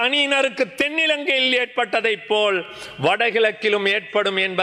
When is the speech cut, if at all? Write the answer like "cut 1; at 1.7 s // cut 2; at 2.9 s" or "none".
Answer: none